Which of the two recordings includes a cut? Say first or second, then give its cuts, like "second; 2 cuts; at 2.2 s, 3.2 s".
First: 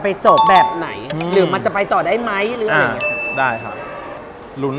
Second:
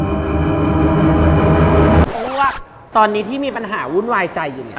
second; 1 cut; at 2.7 s